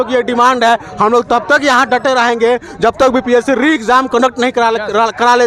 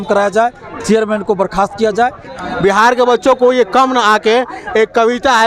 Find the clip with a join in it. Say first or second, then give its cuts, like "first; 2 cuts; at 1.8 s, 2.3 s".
second; 1 cut; at 2.4 s